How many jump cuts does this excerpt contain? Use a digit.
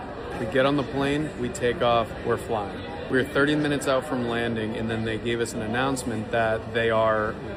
0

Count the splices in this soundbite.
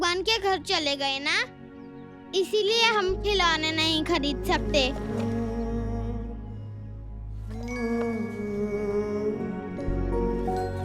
1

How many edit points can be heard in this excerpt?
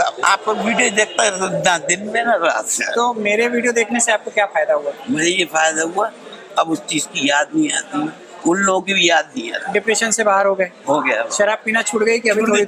0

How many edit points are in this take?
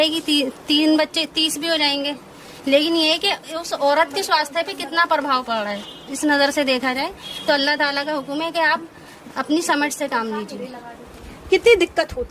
0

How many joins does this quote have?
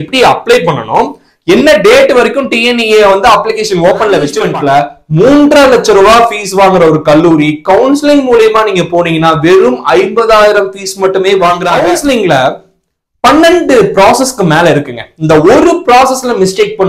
2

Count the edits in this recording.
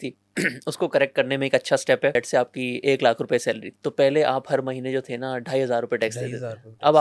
2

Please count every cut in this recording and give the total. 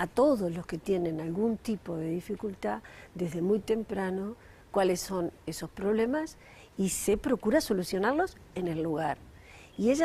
1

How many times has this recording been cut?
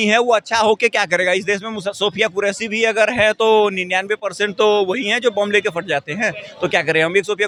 0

